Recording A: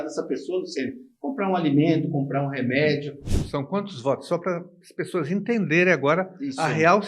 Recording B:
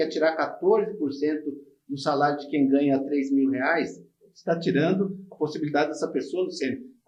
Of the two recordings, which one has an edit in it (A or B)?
A